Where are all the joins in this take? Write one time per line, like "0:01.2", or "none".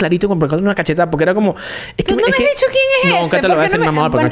none